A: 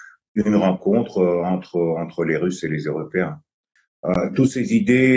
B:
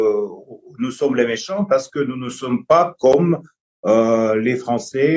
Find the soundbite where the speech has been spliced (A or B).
A